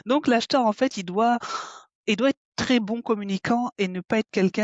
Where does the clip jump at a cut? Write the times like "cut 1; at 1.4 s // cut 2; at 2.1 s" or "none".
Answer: none